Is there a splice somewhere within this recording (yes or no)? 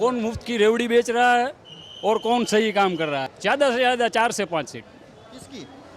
yes